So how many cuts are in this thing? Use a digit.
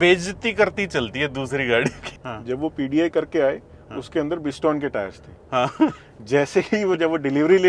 1